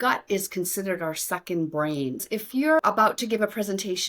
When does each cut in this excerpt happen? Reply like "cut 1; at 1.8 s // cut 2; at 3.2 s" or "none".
cut 1; at 2.8 s